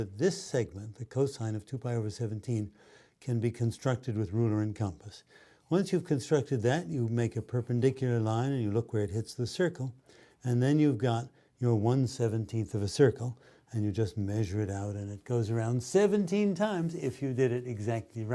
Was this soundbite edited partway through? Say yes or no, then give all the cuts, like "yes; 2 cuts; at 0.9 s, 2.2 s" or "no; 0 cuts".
no; 0 cuts